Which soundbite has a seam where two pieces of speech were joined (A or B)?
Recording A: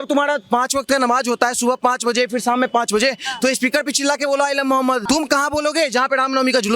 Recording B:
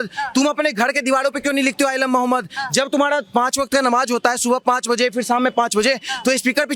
A